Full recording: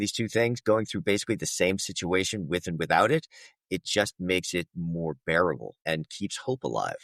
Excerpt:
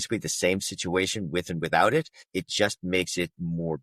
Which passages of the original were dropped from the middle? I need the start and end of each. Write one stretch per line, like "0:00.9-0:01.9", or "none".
0:03.4-0:03.5